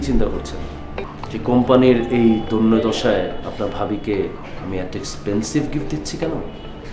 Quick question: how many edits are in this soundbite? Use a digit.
1